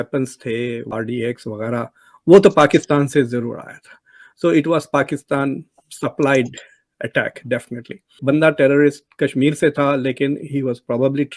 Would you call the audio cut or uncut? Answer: uncut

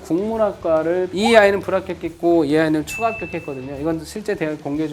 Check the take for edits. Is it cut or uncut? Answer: cut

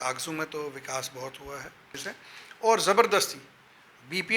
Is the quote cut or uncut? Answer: cut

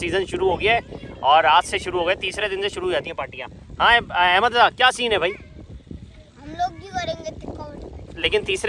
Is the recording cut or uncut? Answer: uncut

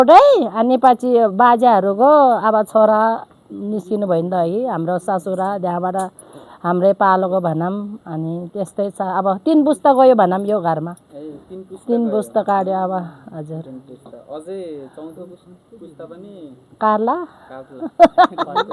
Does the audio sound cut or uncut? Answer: uncut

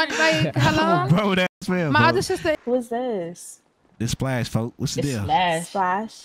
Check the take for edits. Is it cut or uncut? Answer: cut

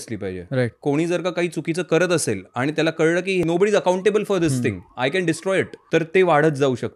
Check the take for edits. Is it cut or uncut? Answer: cut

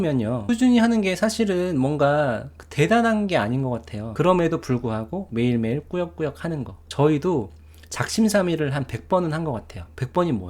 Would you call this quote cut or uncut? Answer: cut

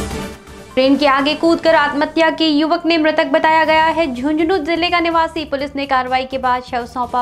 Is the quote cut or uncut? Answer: uncut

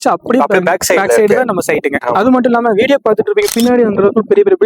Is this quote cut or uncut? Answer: uncut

